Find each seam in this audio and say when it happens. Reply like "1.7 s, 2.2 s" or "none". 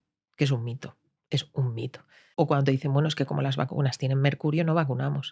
2.2 s